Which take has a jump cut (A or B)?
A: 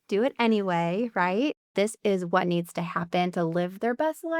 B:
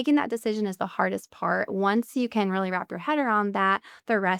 A